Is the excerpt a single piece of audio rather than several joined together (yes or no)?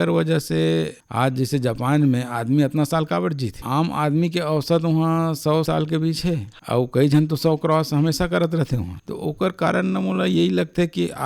no